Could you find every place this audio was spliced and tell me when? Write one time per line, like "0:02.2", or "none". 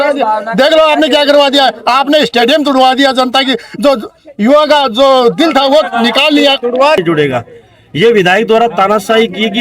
0:07.0